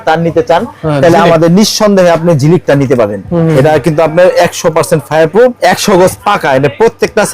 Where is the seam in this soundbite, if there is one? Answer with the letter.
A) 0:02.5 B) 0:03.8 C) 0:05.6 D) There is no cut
C